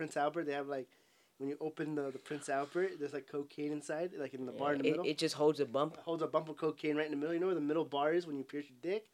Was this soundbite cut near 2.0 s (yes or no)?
no